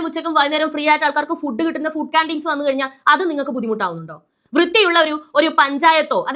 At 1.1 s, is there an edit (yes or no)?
no